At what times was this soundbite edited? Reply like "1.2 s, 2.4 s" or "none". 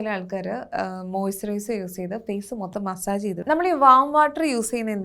3.4 s